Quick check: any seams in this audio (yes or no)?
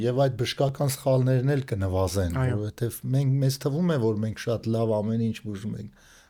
no